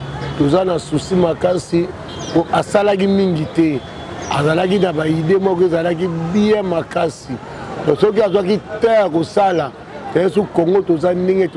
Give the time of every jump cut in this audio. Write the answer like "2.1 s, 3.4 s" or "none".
none